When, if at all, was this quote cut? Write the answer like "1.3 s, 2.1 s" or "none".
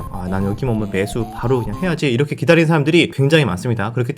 3.1 s